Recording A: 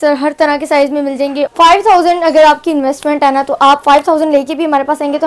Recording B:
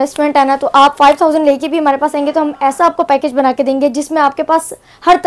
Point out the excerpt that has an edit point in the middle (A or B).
A